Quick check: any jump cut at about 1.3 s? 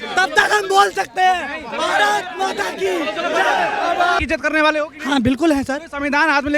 no; 1 cut; at 4.2 s

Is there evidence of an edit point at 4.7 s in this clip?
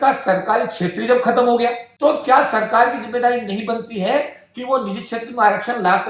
no; 1 cut; at 1.9 s

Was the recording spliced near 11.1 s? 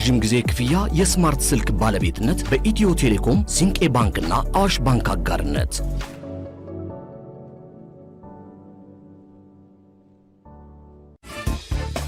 yes; 1 cut; at 11.1 s

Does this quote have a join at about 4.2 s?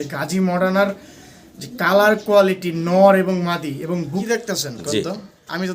yes; 1 cut; at 4.2 s

